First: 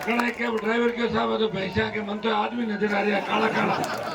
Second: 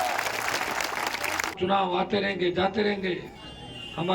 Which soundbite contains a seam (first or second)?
second